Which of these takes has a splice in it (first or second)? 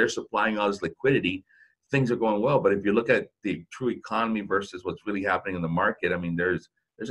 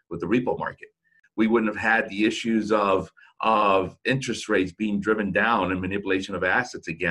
second